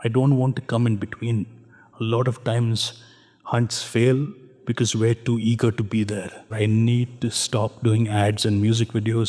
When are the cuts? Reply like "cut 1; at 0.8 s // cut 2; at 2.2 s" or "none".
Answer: cut 1; at 6.5 s